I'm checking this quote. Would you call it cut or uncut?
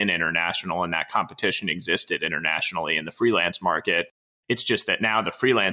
uncut